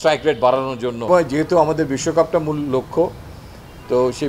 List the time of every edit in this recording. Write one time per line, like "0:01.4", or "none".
0:01.1